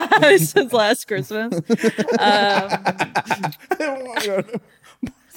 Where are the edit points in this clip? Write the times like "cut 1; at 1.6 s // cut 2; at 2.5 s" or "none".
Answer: none